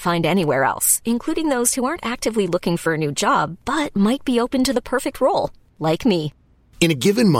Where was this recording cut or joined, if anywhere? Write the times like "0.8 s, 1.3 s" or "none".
none